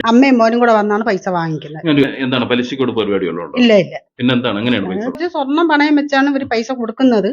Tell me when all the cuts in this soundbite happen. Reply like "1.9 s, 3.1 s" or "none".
5.3 s